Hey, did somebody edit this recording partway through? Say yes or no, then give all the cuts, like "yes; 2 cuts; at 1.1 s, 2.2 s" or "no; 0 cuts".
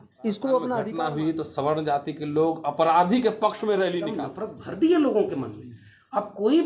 yes; 2 cuts; at 0.9 s, 4.2 s